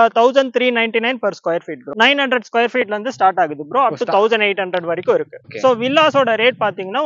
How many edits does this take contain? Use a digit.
2